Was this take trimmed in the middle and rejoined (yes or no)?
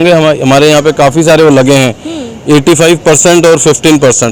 no